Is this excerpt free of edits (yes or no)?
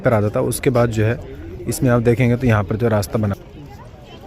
no